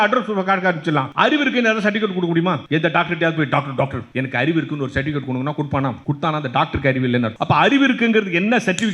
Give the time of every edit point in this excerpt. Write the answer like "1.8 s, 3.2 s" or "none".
1.1 s, 2.6 s, 4.0 s, 6.0 s, 7.3 s